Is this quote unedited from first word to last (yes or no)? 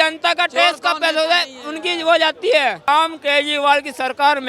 no